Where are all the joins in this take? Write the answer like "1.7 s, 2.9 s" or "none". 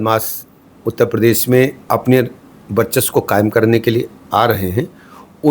1.8 s